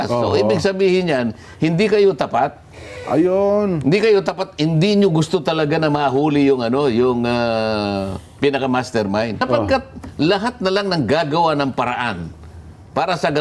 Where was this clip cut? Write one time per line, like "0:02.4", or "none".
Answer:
0:09.4